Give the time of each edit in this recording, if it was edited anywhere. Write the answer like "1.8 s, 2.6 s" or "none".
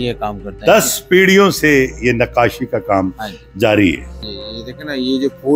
4.3 s